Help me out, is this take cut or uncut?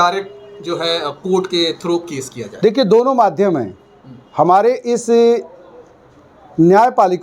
uncut